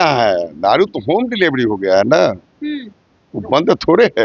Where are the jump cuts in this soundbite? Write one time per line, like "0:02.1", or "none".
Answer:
none